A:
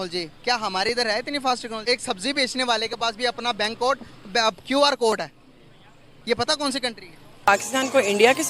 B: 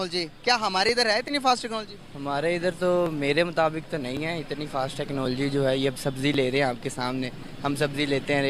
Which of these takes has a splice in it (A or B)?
A